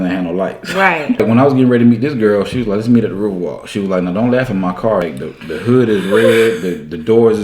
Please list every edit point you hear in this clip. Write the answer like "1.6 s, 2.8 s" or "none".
1.2 s, 5.1 s